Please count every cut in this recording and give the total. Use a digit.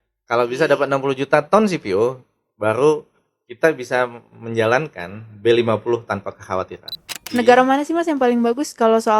1